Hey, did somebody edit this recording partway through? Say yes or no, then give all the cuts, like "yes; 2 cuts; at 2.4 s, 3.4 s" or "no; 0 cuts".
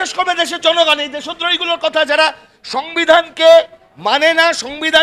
no; 0 cuts